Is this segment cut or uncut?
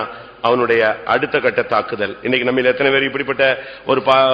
uncut